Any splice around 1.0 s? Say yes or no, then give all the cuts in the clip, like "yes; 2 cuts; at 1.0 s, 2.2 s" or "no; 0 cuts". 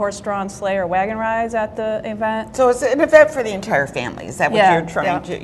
yes; 1 cut; at 1.0 s